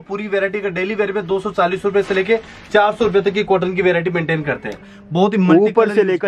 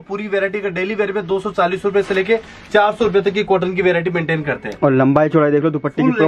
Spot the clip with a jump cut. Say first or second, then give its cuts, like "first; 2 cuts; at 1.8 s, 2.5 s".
first; 1 cut; at 4.8 s